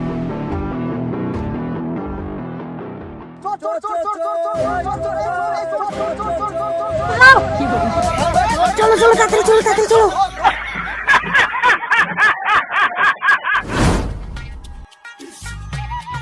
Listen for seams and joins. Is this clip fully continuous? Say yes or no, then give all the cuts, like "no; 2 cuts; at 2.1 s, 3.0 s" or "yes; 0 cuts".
yes; 0 cuts